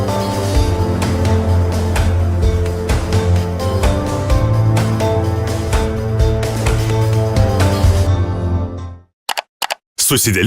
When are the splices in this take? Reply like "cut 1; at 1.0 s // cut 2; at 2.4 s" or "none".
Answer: cut 1; at 9.4 s